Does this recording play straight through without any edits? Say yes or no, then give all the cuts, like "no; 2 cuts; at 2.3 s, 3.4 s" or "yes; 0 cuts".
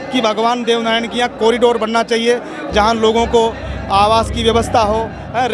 yes; 0 cuts